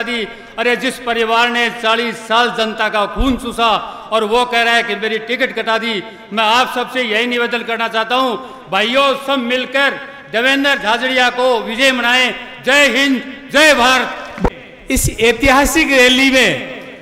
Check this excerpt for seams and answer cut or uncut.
uncut